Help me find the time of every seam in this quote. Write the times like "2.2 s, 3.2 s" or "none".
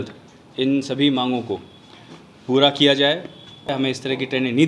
3.7 s